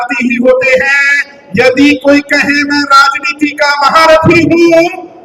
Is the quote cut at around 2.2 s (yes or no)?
no